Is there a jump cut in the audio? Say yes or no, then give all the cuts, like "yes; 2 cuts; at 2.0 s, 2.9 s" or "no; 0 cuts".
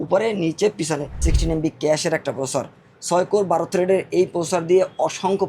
yes; 1 cut; at 1.1 s